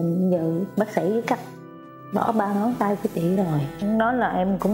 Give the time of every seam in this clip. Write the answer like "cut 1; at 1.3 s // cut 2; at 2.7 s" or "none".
cut 1; at 3.7 s

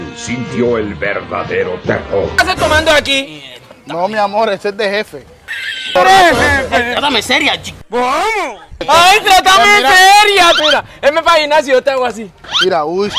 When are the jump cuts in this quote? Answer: cut 1; at 5.9 s // cut 2; at 10.6 s

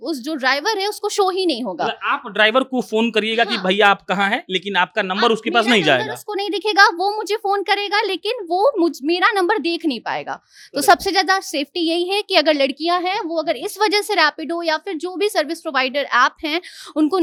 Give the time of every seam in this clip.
none

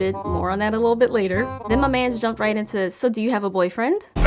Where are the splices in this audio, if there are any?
cut 1; at 1.5 s

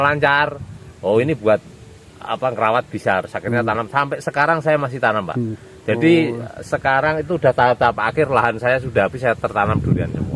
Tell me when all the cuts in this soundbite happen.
none

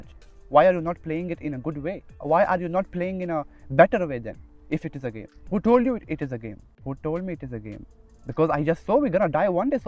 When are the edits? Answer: cut 1; at 2.1 s // cut 2; at 5.3 s // cut 3; at 6.7 s

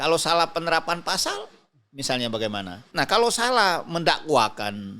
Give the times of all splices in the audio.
cut 1; at 2.9 s

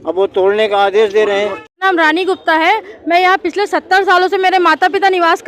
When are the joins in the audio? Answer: cut 1; at 1.8 s

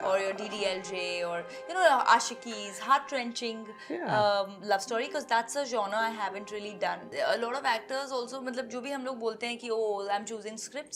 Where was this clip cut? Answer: cut 1; at 7.1 s

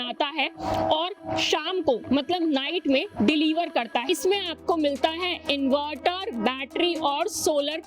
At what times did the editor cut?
cut 1; at 4.0 s

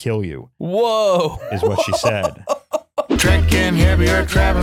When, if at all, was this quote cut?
cut 1; at 3.1 s

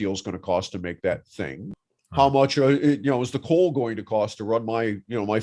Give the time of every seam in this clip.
cut 1; at 1.6 s

